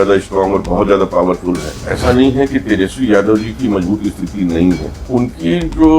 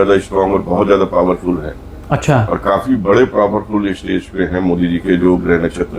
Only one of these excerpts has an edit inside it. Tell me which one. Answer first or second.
first